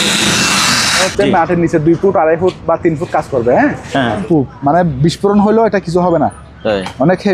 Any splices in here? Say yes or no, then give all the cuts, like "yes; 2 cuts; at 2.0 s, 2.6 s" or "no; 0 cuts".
yes; 2 cuts; at 1.0 s, 4.2 s